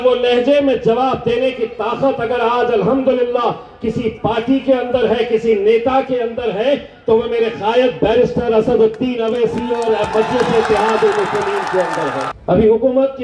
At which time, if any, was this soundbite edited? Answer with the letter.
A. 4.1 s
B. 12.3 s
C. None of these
B